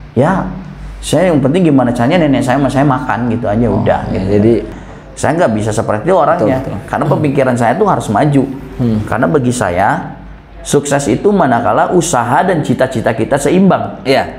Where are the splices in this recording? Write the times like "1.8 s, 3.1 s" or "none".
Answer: 4.7 s